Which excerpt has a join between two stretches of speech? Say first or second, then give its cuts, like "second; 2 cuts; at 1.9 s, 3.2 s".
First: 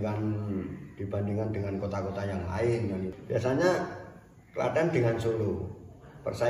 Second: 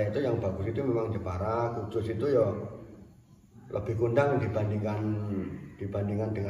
first; 1 cut; at 3.1 s